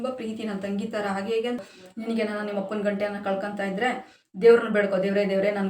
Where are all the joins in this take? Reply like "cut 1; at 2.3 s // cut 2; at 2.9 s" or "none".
cut 1; at 1.6 s